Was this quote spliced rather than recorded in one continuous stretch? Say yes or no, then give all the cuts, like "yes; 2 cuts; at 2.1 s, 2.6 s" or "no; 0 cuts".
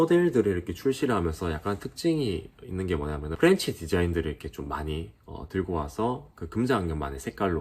no; 0 cuts